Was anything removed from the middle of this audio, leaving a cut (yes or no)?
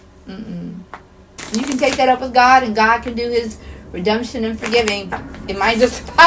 yes